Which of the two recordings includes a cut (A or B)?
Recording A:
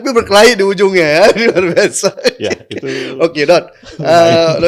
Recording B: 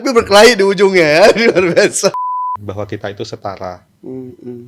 B